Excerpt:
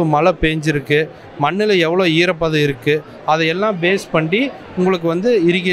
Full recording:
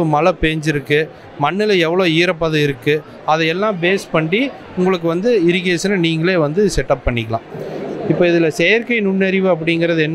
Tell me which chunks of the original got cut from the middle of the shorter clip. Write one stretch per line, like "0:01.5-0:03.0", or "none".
none